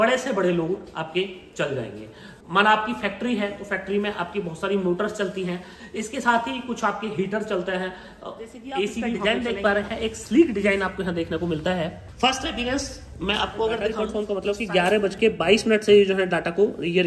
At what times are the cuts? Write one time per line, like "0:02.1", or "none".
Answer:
0:09.2
0:14.1